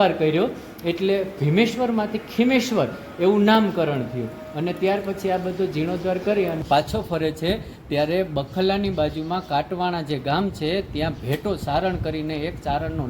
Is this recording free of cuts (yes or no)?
no